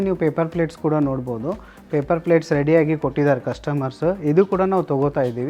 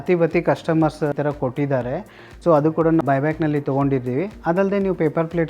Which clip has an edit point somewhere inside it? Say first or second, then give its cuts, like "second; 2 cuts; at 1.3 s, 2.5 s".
second; 2 cuts; at 1.1 s, 3.0 s